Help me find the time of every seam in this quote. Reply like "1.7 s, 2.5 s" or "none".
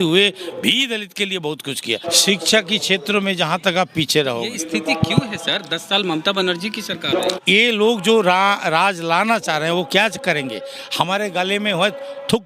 2.0 s, 7.4 s